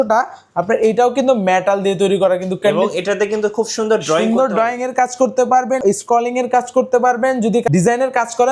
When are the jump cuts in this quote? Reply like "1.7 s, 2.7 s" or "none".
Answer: 5.8 s, 7.6 s